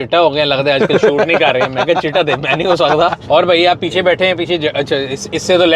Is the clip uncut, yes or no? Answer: no